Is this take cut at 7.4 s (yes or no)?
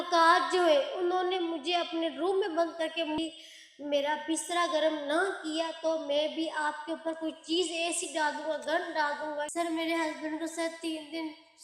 no